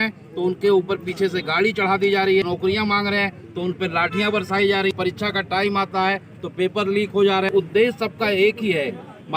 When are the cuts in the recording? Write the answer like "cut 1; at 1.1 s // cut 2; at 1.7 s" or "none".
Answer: cut 1; at 2.5 s // cut 2; at 4.9 s // cut 3; at 7.5 s